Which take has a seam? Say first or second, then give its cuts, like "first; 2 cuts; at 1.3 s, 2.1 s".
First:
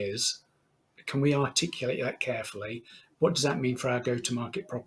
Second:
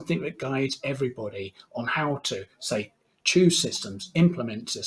first; 1 cut; at 1.0 s